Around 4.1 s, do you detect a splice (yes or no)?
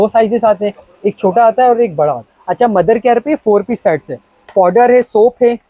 no